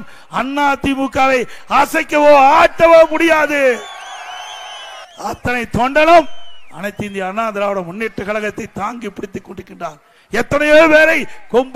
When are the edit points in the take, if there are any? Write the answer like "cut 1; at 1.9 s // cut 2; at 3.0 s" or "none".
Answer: cut 1; at 5.1 s